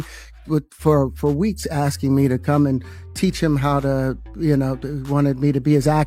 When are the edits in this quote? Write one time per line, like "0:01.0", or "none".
none